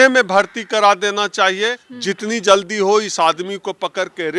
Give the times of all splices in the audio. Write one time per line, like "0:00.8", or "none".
0:01.9